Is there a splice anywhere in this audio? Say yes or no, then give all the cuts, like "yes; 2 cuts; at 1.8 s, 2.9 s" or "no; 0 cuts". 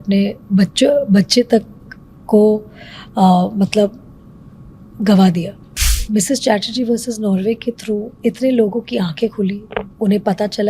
yes; 1 cut; at 6.0 s